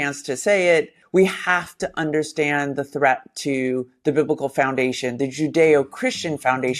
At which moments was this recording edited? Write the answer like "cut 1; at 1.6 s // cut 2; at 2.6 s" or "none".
cut 1; at 1.0 s